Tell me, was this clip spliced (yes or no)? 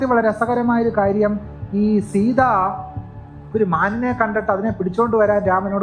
no